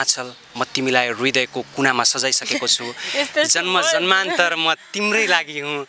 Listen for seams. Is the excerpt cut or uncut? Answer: uncut